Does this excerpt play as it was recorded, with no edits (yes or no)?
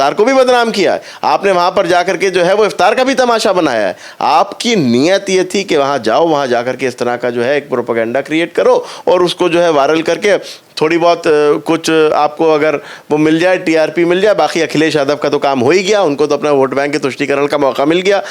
yes